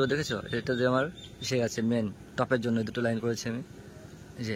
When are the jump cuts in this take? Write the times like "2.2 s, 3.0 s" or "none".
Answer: none